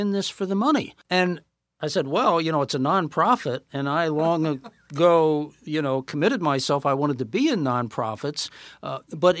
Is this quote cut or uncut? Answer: cut